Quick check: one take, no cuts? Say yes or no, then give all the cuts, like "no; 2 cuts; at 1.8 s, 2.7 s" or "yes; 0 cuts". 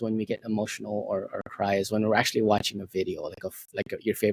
yes; 0 cuts